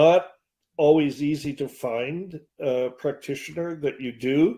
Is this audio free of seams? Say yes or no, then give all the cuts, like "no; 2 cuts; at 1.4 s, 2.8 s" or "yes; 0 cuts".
yes; 0 cuts